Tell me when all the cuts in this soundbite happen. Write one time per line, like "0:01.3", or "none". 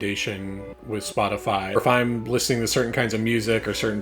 0:01.8